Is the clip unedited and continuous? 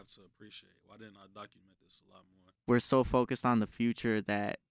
no; 1 cut; at 2.4 s

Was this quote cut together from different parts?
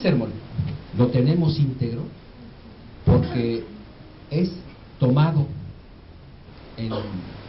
no; 0 cuts

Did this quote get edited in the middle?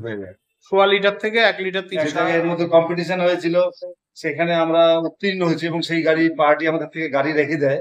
yes; 1 cut; at 2.1 s

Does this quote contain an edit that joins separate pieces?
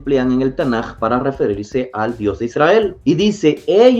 yes; 1 cut; at 3.0 s

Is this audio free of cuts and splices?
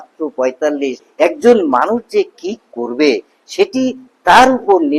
no; 1 cut; at 1.0 s

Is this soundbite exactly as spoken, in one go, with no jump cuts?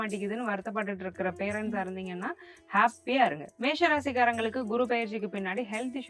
no; 1 cut; at 3.5 s

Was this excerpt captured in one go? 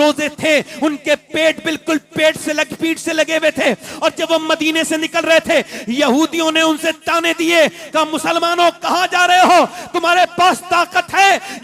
yes; 0 cuts

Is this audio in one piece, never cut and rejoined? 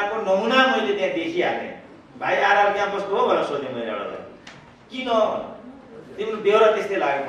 yes; 0 cuts

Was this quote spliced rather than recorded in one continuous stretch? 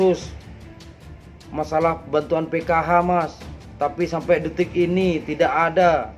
no; 0 cuts

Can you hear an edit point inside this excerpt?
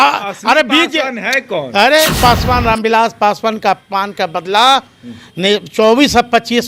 yes; 1 cut; at 2.2 s

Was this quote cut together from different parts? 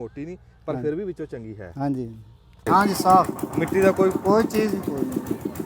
yes; 1 cut; at 2.6 s

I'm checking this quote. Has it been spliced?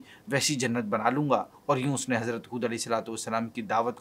yes; 1 cut; at 1.5 s

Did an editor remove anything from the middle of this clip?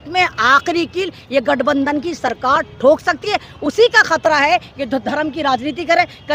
no; 0 cuts

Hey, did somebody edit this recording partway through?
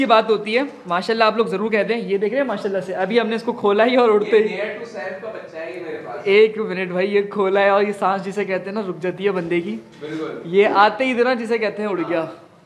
no; 0 cuts

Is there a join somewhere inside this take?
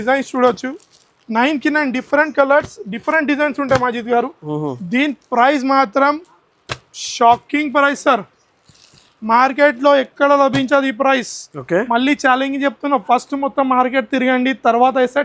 no; 0 cuts

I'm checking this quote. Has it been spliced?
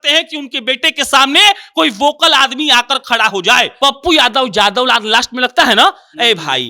yes; 1 cut; at 3.7 s

